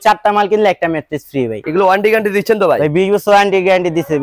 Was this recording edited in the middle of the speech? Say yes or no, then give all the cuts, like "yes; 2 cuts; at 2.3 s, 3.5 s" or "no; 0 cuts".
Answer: yes; 1 cut; at 1.6 s